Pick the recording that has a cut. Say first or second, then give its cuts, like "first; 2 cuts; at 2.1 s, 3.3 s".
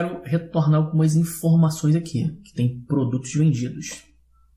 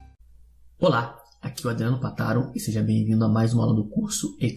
first; 1 cut; at 3.2 s